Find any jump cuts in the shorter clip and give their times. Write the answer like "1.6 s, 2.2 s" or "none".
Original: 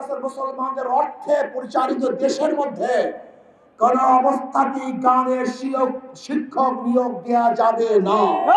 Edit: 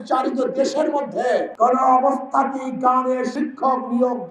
1.5 s, 3.3 s